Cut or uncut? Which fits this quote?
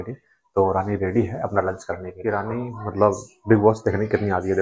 cut